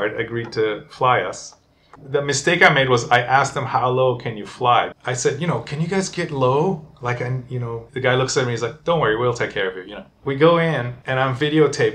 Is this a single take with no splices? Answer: no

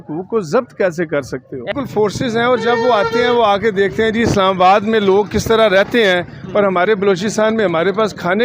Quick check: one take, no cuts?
no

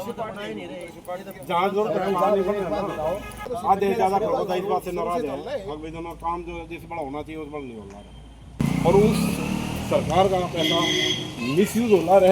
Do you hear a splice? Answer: yes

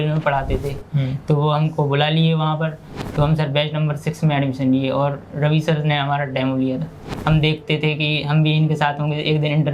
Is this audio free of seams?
no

